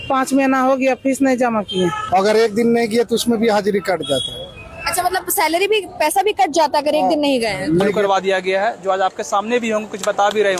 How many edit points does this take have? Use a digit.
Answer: 2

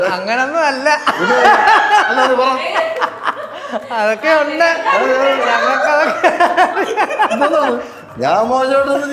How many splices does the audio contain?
1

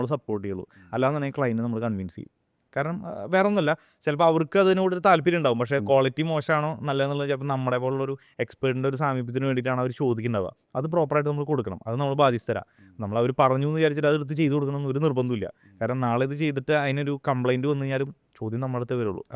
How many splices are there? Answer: 0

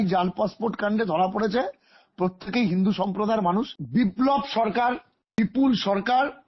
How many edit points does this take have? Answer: 2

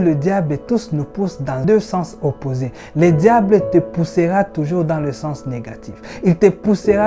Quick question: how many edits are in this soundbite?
1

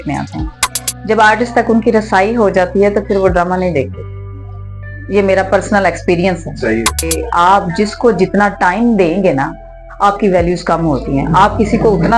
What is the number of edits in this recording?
1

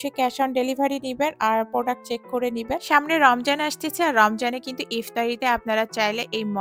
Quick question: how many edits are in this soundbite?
1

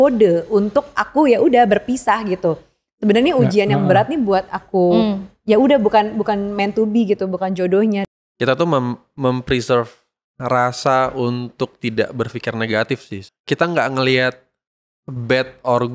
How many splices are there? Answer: 2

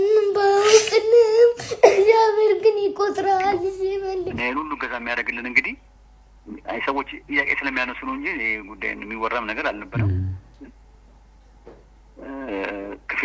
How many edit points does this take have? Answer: 1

